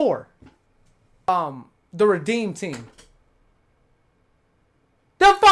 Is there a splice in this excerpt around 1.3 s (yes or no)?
yes